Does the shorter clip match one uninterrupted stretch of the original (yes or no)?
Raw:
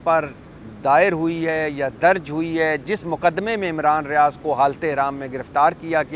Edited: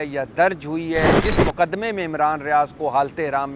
yes